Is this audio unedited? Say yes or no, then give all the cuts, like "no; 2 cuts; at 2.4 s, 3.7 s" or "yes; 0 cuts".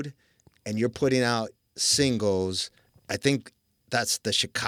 yes; 0 cuts